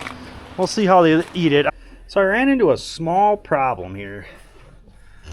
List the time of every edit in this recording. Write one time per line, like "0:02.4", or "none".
0:01.7